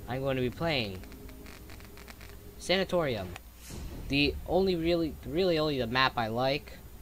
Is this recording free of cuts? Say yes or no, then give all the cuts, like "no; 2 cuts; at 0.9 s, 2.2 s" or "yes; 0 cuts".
no; 1 cut; at 1.6 s